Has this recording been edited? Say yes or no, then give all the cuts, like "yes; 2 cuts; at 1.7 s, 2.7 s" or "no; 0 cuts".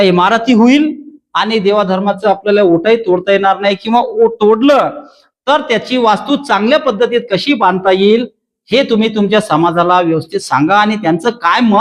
no; 0 cuts